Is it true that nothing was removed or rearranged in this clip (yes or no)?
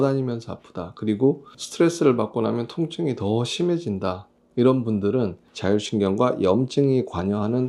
no